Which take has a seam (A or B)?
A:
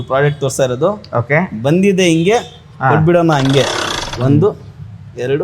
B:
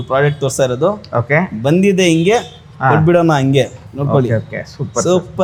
A